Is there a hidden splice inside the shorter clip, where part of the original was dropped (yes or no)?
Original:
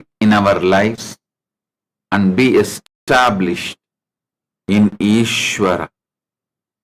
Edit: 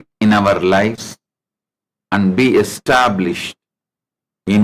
yes